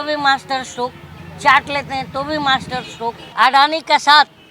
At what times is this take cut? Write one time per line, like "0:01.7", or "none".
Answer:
0:03.2